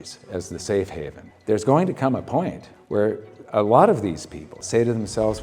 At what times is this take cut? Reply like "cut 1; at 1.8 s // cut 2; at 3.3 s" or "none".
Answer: cut 1; at 1.3 s // cut 2; at 2.7 s // cut 3; at 4.6 s